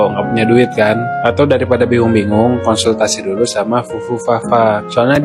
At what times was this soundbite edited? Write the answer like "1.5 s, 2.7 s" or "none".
none